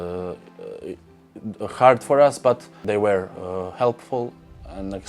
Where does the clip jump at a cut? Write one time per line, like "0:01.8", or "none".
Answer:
0:02.8